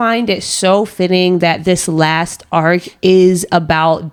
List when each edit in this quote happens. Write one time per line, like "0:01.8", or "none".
none